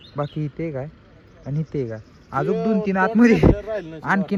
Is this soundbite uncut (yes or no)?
yes